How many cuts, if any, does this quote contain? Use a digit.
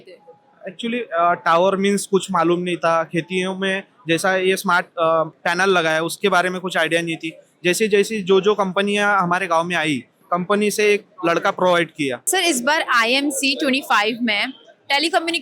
3